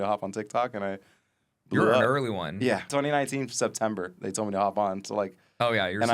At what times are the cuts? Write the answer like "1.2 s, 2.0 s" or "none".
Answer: 2.9 s